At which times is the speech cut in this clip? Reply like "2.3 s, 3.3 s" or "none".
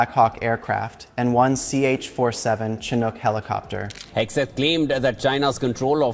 4.0 s